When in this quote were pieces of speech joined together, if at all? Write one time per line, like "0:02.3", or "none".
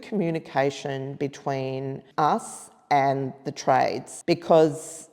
0:02.0
0:04.1